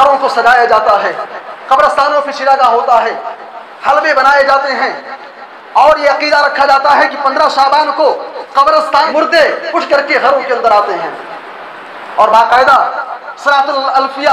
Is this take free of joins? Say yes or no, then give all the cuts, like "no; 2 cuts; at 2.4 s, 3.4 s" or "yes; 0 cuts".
no; 1 cut; at 9.1 s